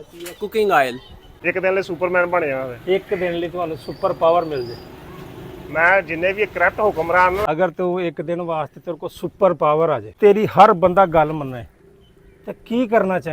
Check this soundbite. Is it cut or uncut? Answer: cut